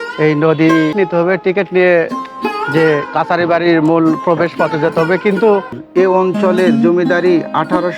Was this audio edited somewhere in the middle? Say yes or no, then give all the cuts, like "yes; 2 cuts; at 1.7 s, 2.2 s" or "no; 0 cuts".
yes; 2 cuts; at 0.9 s, 5.8 s